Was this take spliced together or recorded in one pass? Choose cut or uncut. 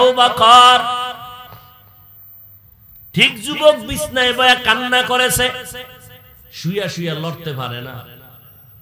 uncut